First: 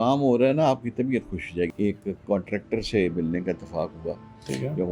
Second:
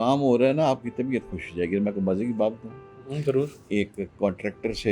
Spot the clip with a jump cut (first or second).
first